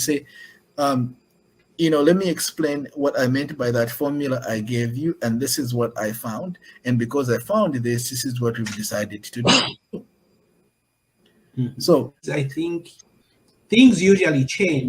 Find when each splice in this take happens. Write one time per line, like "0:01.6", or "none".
0:12.3